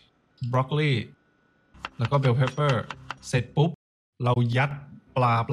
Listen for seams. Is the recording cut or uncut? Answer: uncut